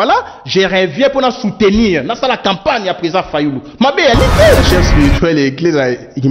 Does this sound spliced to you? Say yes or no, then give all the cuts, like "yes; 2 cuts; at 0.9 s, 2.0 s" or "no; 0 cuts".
yes; 1 cut; at 4.6 s